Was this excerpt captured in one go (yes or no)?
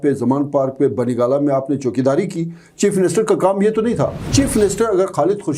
no